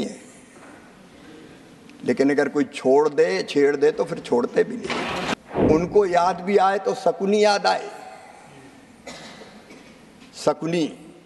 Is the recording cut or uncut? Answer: cut